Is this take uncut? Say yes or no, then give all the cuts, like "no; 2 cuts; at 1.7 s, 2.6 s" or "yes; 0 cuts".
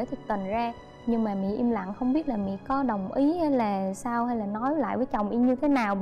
no; 1 cut; at 0.9 s